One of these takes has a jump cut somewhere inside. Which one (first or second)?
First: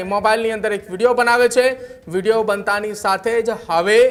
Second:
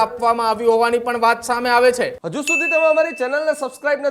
second